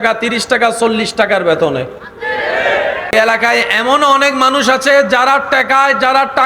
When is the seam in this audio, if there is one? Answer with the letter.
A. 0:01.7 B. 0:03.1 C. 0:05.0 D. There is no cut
B